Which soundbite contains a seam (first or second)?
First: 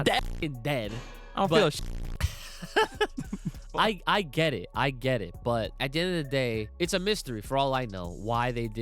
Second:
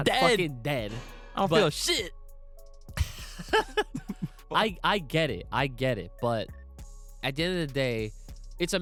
first